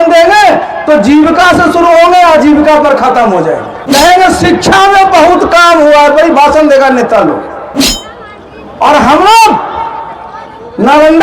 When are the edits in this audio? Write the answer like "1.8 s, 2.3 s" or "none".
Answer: 3.9 s